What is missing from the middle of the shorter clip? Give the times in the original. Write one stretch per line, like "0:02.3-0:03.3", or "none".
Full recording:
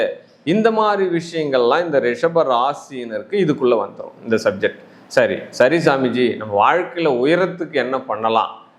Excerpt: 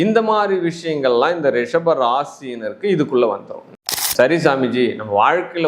0:04.4-0:05.3